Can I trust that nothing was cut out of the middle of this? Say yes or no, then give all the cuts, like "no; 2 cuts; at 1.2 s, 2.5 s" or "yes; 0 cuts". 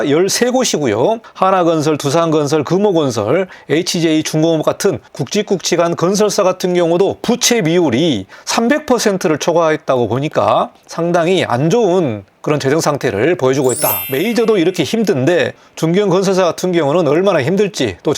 no; 6 cuts; at 1.3 s, 3.6 s, 5.1 s, 8.3 s, 10.8 s, 14.0 s